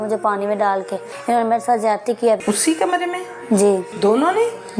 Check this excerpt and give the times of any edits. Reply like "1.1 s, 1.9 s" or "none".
1.1 s, 2.4 s, 3.9 s